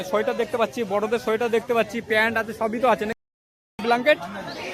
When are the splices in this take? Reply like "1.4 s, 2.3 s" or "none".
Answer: 3.1 s